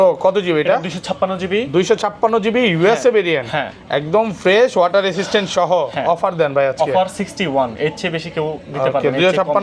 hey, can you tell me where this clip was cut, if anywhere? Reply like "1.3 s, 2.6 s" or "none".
none